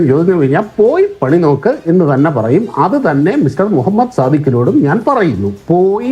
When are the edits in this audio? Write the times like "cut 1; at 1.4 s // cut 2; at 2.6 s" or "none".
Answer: none